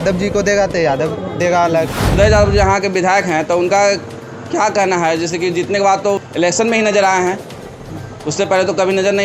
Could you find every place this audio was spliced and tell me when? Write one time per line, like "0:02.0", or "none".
0:02.1
0:06.2